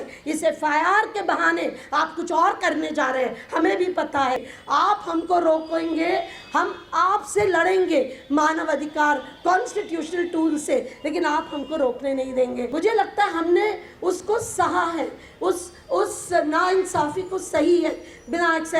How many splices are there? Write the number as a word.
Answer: two